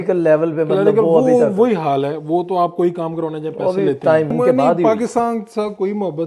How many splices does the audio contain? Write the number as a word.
one